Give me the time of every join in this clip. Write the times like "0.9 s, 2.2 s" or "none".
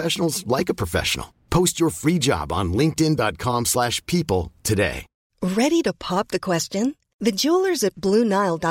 5.3 s

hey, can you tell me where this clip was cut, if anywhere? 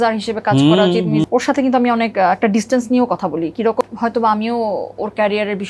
1.2 s, 3.8 s

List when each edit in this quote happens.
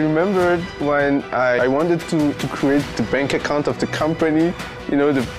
1.6 s

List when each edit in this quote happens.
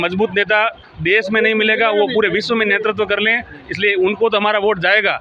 none

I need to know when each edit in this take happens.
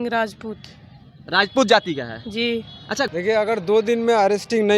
3.1 s

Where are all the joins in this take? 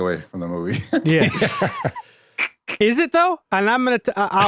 none

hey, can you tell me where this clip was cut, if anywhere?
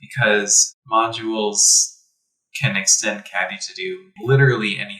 4.1 s

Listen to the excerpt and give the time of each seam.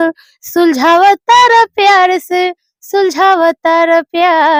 none

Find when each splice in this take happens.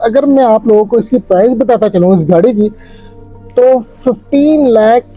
none

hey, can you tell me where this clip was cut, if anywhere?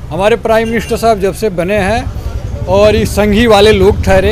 none

